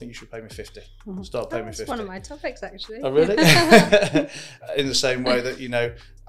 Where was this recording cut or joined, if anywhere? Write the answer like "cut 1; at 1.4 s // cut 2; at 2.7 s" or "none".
cut 1; at 4.6 s